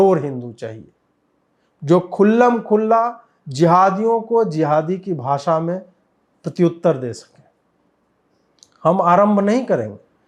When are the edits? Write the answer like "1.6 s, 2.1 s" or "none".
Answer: none